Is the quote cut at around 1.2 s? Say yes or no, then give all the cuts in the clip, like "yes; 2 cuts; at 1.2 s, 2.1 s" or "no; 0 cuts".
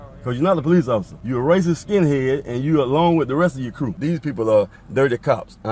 yes; 2 cuts; at 1.2 s, 4.0 s